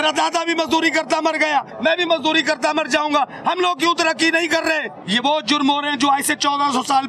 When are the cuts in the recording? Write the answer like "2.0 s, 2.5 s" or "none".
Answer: 1.7 s, 4.9 s